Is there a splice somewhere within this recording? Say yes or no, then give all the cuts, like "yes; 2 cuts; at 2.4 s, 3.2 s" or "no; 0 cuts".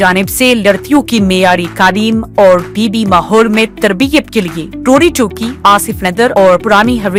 no; 0 cuts